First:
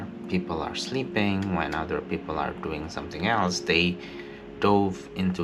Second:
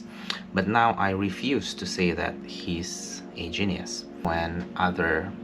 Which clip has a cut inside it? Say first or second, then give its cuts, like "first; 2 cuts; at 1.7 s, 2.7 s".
second; 1 cut; at 4.2 s